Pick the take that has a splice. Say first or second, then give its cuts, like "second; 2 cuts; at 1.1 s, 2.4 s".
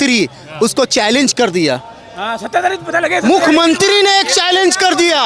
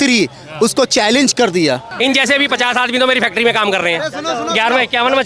second; 1 cut; at 1.9 s